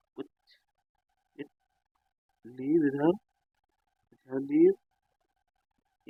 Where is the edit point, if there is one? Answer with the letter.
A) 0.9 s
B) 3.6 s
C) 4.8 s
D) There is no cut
D